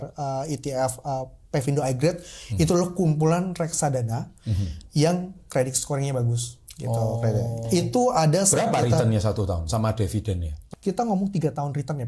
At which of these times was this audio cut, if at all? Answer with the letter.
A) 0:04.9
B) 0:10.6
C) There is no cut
B